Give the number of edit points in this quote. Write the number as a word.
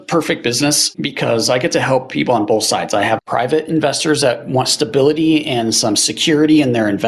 two